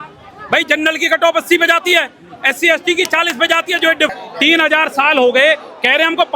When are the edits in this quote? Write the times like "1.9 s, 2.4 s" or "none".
4.1 s